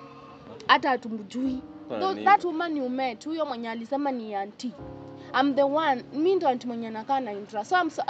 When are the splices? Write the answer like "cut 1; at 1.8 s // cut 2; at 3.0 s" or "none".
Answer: cut 1; at 1.9 s

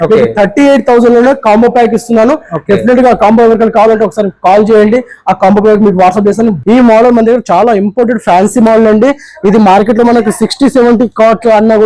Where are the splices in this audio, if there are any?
cut 1; at 6.6 s

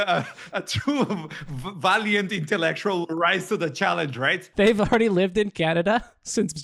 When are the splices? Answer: cut 1; at 4.4 s

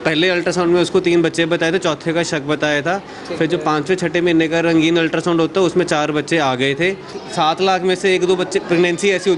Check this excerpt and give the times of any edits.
cut 1; at 7.2 s

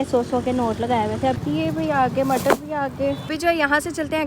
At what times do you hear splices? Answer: cut 1; at 1.4 s // cut 2; at 3.3 s

